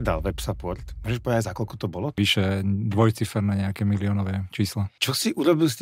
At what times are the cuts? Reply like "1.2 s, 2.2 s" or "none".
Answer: 0.9 s, 2.2 s, 4.9 s